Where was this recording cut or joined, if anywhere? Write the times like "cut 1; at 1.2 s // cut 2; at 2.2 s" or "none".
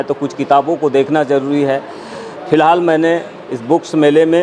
none

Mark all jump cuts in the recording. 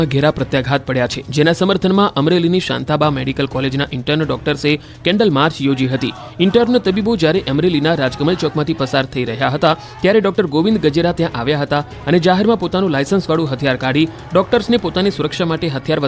cut 1; at 11.2 s

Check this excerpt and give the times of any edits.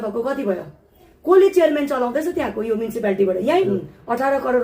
cut 1; at 3.6 s

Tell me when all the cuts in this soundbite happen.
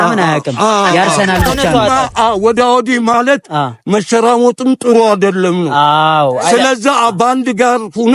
cut 1; at 1.6 s

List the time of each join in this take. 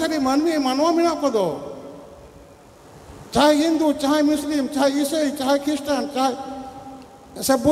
cut 1; at 3.2 s

